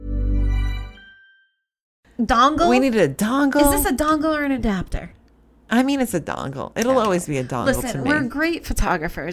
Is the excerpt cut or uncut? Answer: cut